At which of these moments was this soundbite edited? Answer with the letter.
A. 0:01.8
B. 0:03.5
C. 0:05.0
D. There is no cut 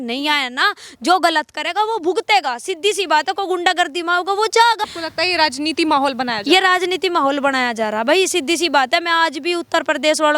C